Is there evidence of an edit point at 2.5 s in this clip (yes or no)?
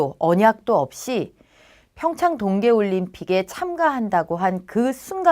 yes